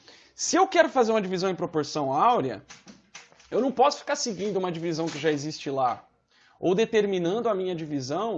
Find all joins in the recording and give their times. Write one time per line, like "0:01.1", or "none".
none